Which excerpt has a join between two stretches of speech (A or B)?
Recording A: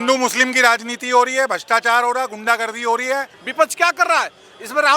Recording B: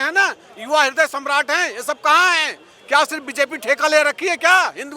A